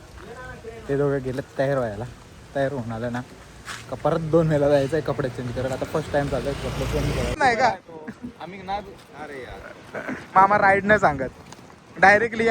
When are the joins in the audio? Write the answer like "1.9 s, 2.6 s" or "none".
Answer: 7.4 s